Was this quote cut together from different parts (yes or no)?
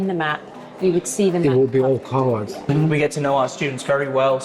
yes